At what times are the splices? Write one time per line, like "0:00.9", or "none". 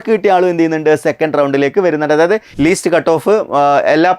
0:02.5

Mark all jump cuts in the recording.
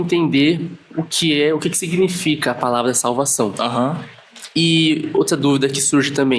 none

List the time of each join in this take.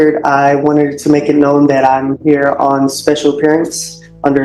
none

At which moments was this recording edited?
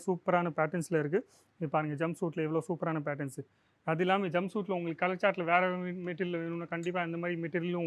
none

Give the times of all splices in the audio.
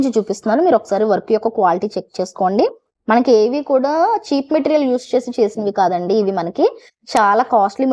none

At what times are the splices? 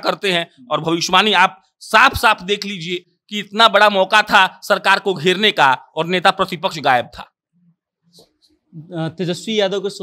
none

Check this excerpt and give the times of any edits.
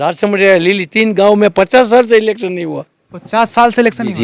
none

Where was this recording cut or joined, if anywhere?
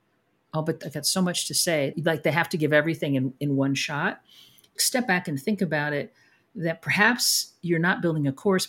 0:00.8
0:01.9
0:04.8

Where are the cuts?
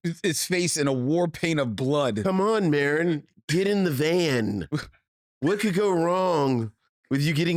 none

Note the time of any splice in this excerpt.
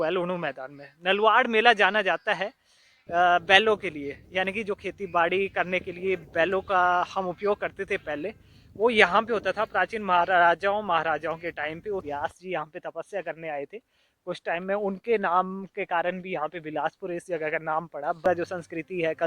0:12.1
0:18.2

